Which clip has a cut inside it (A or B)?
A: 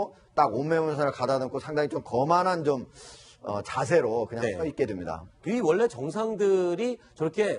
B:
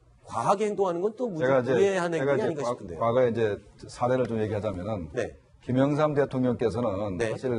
A